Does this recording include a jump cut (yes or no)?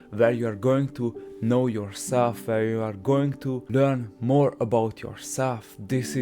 yes